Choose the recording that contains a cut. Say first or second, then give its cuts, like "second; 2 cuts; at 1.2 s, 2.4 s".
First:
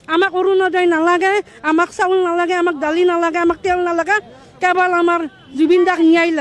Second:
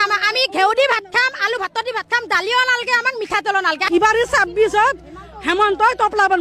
second; 1 cut; at 3.8 s